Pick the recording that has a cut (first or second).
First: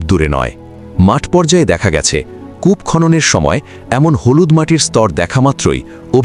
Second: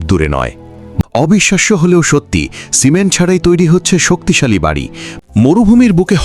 second